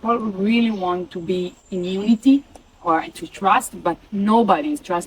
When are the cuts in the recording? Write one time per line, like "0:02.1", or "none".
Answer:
0:01.6

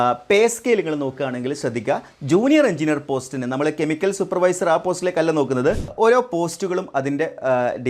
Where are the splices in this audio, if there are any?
0:05.9

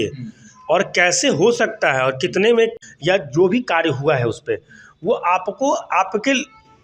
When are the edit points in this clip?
0:02.9

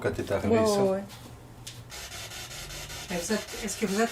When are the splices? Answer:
0:01.9

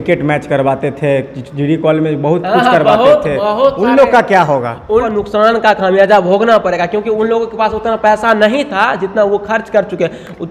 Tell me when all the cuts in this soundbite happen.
0:05.0

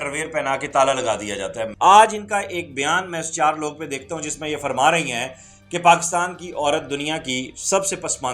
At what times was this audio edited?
0:01.7

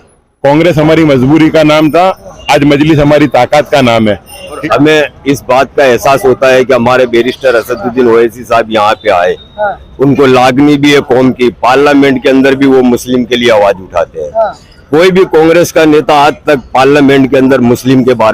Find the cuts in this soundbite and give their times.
0:04.6

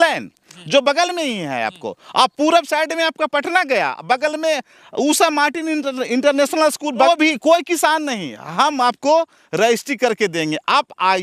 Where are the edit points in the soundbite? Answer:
0:07.1

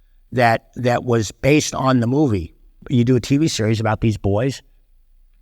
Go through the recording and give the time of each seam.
0:02.8

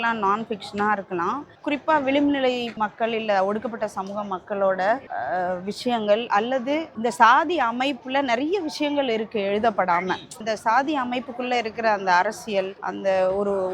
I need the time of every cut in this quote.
0:02.7
0:10.4
0:12.8

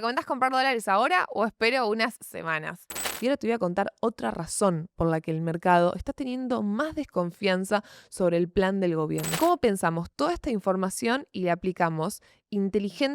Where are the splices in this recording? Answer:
0:03.1
0:09.4

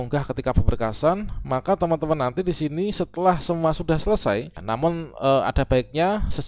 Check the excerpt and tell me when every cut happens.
0:04.6

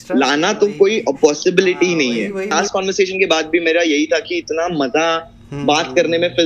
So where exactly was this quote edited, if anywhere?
0:02.5

